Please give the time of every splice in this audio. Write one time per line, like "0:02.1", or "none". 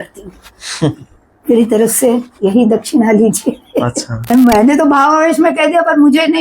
0:04.1